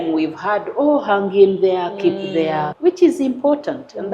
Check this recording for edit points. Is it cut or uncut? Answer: cut